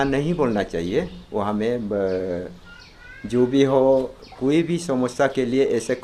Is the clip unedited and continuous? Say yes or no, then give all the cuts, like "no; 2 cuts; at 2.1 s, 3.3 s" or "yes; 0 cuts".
yes; 0 cuts